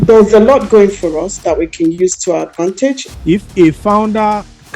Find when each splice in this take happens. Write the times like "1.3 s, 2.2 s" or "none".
3.0 s